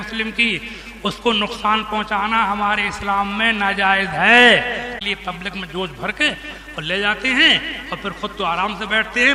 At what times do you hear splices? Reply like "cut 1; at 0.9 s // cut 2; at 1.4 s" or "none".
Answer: cut 1; at 5.0 s

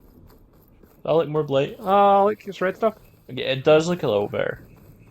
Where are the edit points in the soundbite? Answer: cut 1; at 1.0 s

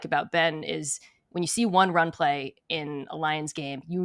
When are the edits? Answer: none

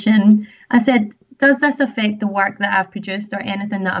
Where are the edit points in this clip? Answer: cut 1; at 1.2 s

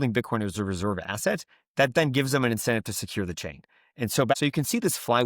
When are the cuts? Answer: cut 1; at 4.3 s

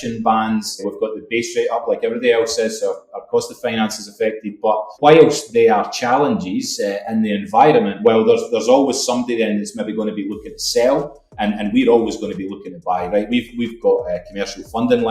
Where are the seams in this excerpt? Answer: none

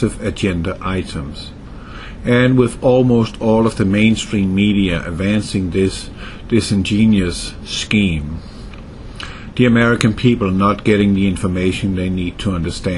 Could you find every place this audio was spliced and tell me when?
cut 1; at 5.6 s

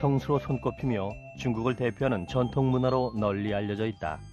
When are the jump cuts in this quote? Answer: none

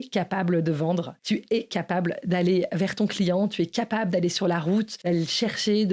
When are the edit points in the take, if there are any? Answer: cut 1; at 1.1 s // cut 2; at 4.9 s

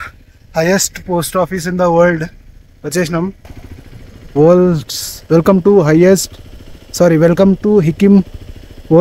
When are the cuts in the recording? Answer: none

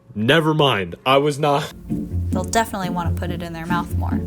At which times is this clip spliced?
cut 1; at 1.8 s

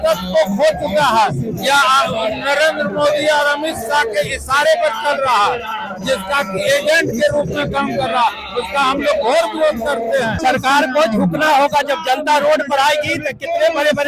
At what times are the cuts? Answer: cut 1; at 10.3 s

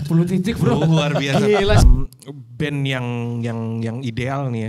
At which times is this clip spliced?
cut 1; at 1.8 s

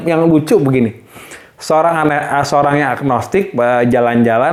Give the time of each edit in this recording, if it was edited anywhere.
none

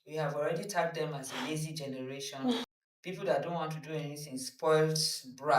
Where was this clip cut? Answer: cut 1; at 2.7 s

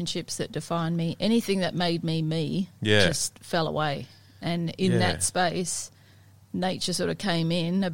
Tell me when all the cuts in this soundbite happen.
none

